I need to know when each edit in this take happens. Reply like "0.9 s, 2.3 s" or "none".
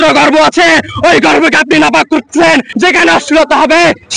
2.7 s